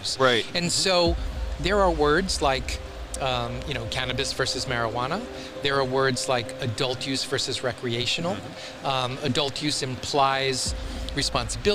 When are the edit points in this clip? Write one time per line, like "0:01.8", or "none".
none